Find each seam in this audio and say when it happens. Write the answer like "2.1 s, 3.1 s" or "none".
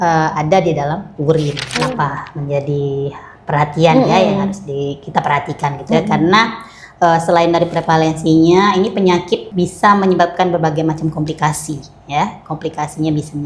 1.6 s, 9.5 s